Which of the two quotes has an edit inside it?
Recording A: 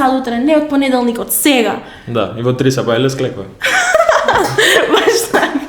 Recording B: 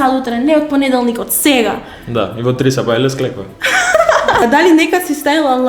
B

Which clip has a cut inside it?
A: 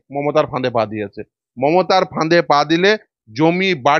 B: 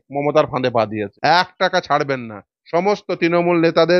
B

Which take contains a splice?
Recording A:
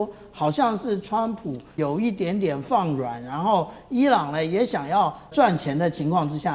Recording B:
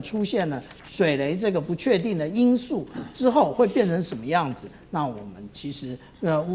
A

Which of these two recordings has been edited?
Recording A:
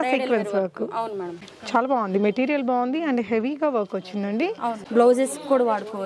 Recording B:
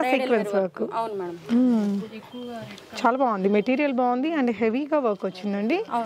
A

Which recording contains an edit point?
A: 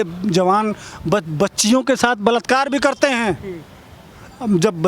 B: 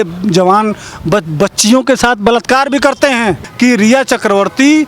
B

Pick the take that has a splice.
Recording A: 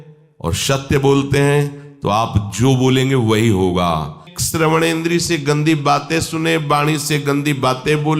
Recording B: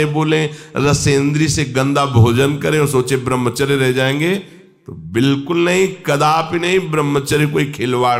A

